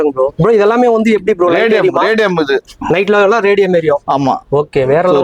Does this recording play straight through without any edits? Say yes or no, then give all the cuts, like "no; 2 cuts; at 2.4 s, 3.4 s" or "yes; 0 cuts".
yes; 0 cuts